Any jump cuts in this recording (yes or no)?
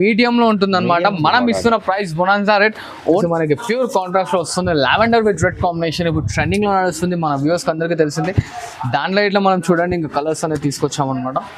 yes